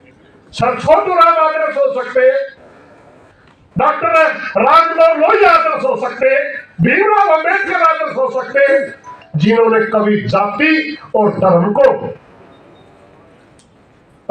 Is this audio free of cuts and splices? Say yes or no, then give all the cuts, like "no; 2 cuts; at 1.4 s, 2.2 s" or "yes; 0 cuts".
yes; 0 cuts